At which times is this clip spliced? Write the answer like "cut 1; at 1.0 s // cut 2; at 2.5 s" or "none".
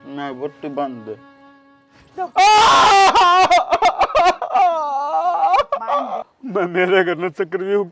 cut 1; at 6.2 s